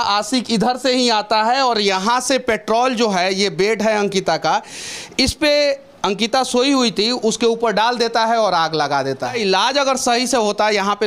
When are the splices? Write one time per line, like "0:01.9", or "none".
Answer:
0:09.4